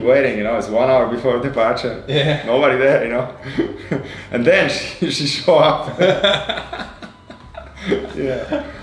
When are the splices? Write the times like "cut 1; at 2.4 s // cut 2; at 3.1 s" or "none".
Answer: none